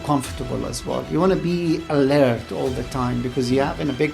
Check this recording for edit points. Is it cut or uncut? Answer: uncut